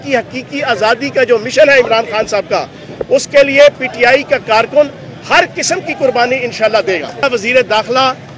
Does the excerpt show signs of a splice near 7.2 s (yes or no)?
yes